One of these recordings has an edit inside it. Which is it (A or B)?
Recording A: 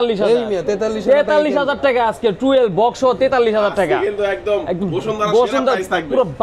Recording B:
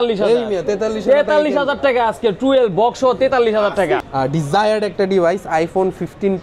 B